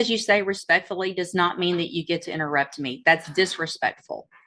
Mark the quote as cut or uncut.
uncut